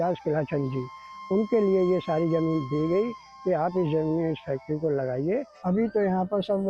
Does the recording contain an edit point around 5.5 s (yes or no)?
yes